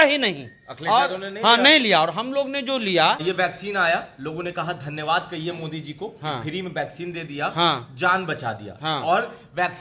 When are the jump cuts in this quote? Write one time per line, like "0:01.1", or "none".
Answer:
0:03.2